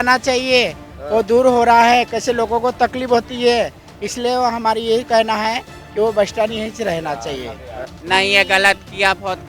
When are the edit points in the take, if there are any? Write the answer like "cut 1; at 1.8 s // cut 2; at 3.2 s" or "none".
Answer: cut 1; at 7.9 s